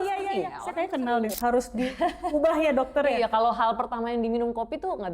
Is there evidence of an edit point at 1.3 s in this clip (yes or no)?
yes